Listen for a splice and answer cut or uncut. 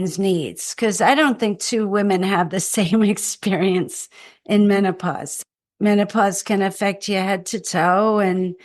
cut